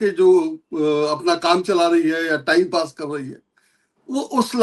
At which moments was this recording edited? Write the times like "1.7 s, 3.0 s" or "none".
none